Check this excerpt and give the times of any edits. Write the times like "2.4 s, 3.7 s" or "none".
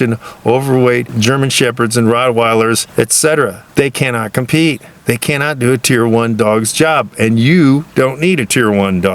1.1 s, 2.8 s, 3.6 s